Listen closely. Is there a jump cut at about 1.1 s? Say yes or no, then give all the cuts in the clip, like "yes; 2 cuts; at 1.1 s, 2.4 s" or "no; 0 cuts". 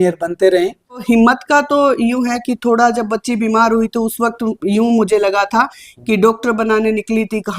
yes; 1 cut; at 1.1 s